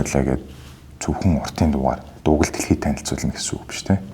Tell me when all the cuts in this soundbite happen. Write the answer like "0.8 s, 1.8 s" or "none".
2.1 s